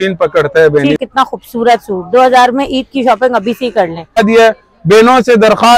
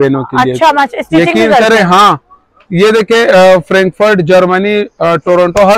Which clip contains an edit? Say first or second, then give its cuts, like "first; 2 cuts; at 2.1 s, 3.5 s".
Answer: first; 2 cuts; at 1.0 s, 4.2 s